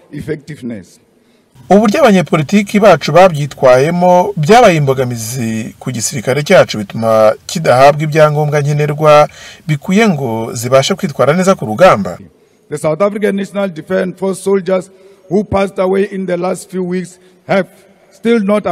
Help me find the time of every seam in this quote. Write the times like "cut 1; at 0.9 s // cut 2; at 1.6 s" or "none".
cut 1; at 12.2 s